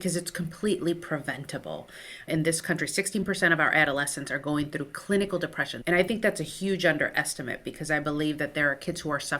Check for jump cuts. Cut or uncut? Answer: cut